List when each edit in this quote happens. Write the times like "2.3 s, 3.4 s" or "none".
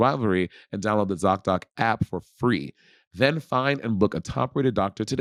none